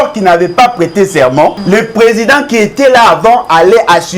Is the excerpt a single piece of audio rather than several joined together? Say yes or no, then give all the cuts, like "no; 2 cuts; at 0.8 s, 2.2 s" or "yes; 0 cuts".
no; 1 cut; at 1.6 s